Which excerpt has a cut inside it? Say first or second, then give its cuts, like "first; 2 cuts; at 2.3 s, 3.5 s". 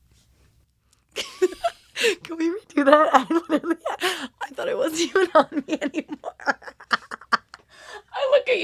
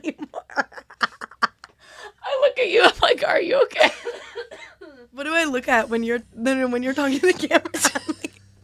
second; 1 cut; at 5.1 s